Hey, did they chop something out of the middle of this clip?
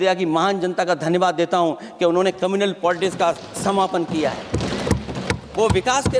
no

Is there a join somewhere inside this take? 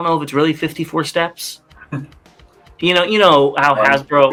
no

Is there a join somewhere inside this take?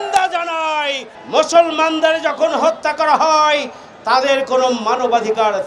yes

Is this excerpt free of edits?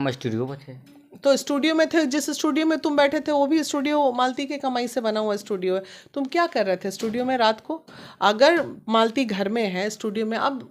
yes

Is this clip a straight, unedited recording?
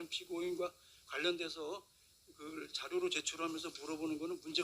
yes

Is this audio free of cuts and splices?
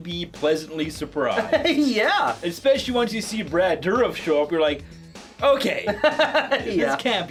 yes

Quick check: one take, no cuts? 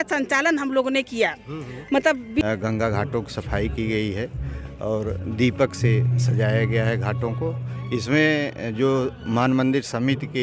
no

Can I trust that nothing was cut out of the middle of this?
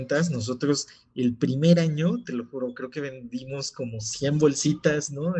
yes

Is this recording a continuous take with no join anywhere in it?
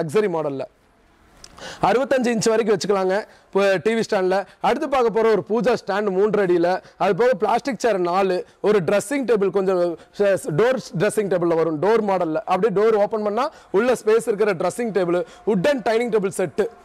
yes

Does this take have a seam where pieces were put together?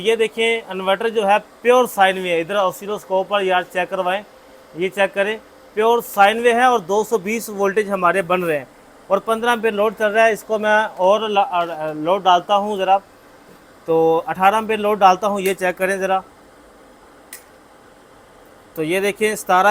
no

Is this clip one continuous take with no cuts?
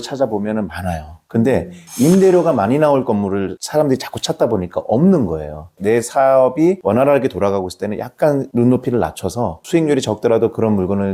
yes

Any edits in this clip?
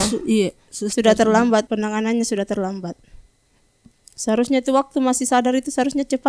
no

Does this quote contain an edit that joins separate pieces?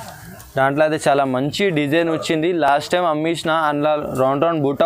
no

